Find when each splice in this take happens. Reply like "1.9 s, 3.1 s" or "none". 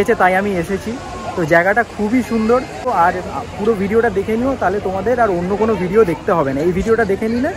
2.9 s